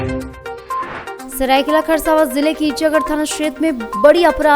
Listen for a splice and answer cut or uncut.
cut